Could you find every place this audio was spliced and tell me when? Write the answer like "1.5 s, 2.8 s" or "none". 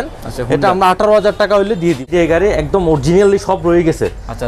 2.0 s